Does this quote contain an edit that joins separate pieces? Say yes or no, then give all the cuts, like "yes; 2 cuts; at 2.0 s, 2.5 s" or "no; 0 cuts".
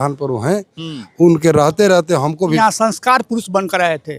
yes; 1 cut; at 2.6 s